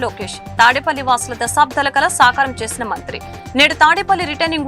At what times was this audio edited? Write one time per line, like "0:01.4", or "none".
none